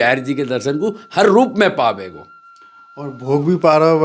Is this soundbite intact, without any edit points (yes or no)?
yes